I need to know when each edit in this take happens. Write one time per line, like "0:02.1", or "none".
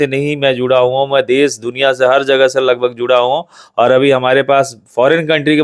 none